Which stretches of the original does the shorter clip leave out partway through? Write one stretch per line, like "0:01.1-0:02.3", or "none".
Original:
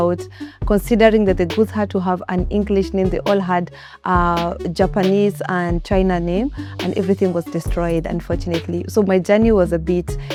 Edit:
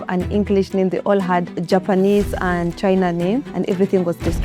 0:03.8-0:04.6
0:06.6-0:06.8